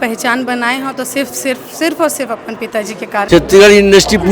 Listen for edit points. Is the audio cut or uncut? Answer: cut